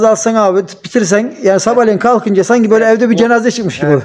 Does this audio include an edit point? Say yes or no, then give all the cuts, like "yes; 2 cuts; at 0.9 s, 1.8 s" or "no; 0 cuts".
no; 0 cuts